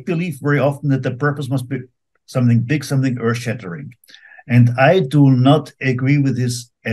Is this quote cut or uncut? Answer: uncut